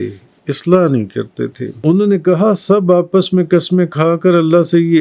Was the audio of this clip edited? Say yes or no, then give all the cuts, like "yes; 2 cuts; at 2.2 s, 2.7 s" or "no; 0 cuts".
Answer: yes; 1 cut; at 1.7 s